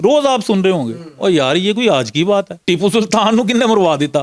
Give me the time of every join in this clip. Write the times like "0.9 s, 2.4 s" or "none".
2.5 s